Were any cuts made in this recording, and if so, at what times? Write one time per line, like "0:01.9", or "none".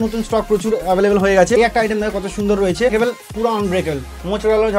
0:01.6
0:02.9